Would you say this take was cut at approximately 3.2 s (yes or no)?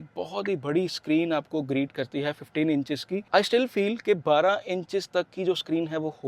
yes